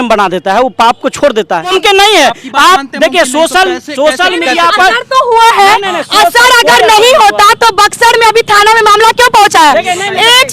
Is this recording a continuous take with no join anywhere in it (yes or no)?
no